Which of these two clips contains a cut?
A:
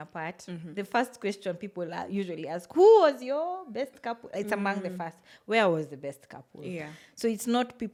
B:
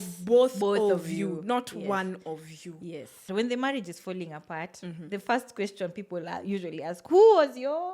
B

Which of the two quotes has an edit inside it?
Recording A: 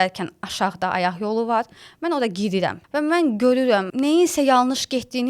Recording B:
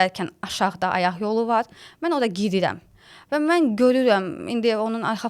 A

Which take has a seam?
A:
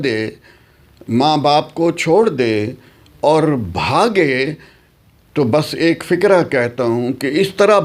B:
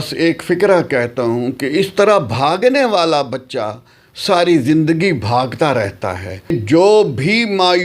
B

